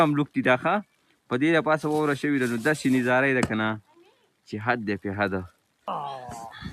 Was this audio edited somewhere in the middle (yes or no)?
yes